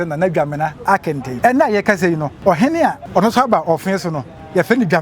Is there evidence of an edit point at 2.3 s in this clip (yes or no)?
yes